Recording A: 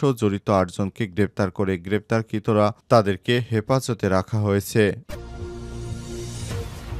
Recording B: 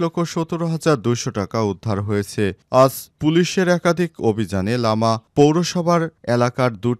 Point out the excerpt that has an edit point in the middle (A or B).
A